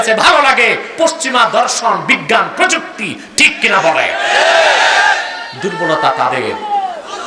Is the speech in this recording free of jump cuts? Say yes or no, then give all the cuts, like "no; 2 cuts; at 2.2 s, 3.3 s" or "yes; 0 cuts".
yes; 0 cuts